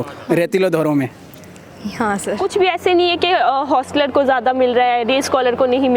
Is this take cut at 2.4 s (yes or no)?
yes